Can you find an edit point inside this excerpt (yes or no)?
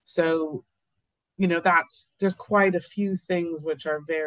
no